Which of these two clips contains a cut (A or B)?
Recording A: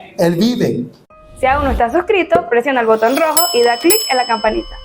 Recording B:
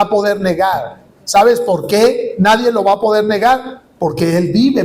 A